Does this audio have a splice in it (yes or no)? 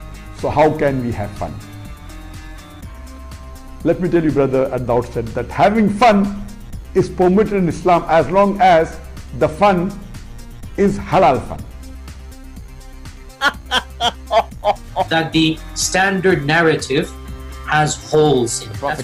no